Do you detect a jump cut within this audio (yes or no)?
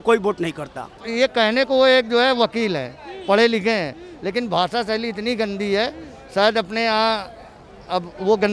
yes